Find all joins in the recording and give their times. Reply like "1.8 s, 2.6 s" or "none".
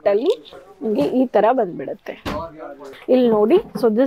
2.9 s